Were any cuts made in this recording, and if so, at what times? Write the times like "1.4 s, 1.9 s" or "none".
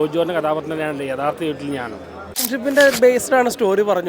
2.2 s

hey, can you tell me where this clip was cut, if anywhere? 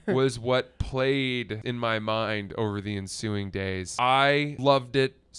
1.6 s, 3.9 s, 4.5 s

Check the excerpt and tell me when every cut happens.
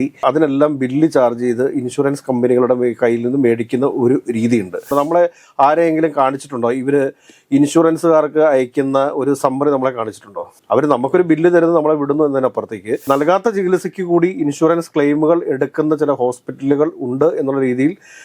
4.9 s, 13.0 s

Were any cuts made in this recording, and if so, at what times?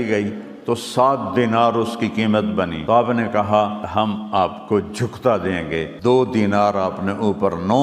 2.9 s, 4.0 s, 5.9 s

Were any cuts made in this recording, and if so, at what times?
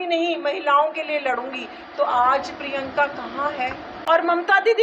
3.9 s

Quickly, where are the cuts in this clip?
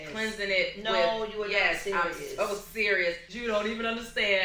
3.3 s

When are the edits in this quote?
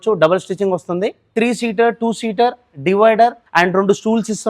1.3 s, 3.4 s

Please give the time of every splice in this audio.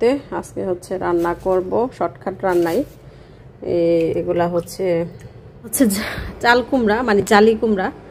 5.7 s

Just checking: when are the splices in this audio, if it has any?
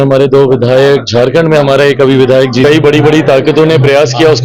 2.6 s

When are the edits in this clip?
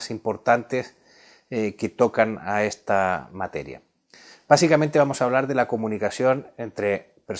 1.7 s

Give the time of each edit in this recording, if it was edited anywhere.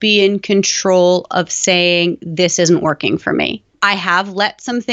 3.8 s

